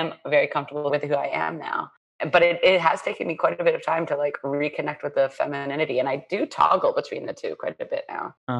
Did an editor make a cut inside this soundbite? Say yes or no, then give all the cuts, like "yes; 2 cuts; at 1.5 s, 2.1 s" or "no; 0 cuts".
yes; 2 cuts; at 0.9 s, 2.0 s